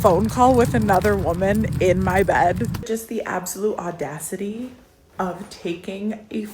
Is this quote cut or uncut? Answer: cut